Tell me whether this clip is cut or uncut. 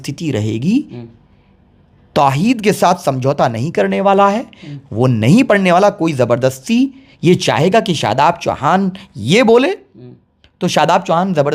uncut